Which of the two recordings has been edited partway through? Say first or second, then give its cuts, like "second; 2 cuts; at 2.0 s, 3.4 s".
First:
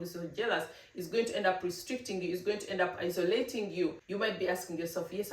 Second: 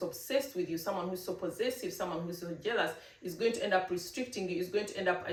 first; 1 cut; at 4.0 s